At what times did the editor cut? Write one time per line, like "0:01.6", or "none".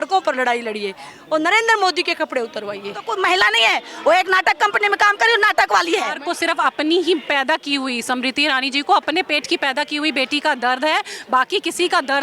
0:03.1
0:06.2